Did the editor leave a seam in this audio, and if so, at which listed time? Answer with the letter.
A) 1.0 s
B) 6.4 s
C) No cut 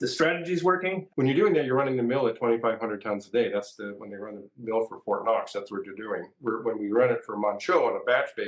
A